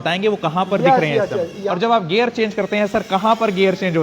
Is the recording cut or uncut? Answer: cut